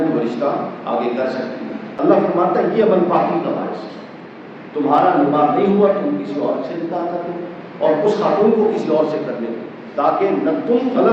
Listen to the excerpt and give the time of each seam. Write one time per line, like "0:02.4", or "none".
0:01.8